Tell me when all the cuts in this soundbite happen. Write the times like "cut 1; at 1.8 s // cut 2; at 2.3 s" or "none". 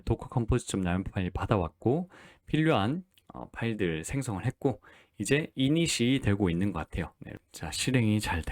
cut 1; at 7.2 s